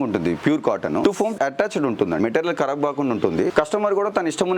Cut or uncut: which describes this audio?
cut